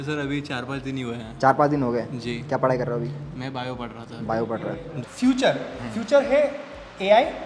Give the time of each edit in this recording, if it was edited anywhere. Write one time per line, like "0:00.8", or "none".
0:05.0